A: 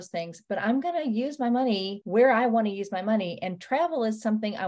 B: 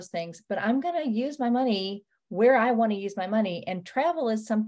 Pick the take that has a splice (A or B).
A